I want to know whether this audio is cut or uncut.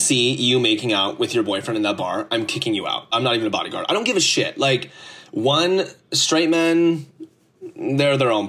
uncut